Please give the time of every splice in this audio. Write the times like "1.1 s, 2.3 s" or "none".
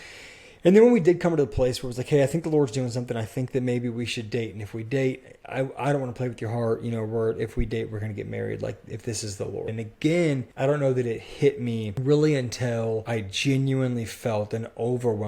9.7 s, 10.5 s, 11.9 s, 13.1 s